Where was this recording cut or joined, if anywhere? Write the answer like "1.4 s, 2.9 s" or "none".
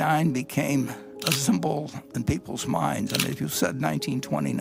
none